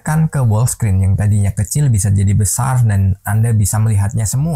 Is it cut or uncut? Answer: uncut